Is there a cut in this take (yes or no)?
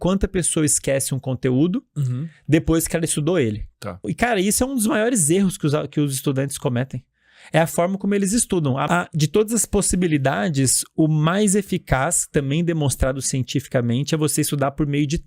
yes